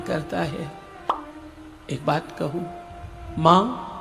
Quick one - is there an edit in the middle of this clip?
no; 0 cuts

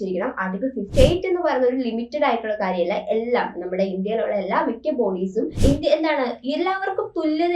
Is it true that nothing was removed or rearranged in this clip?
no; 2 cuts; at 0.9 s, 5.5 s

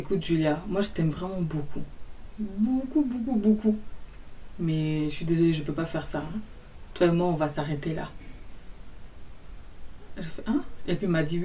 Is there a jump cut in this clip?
no; 0 cuts

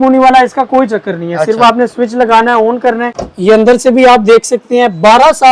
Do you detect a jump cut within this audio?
yes; 1 cut; at 3.2 s

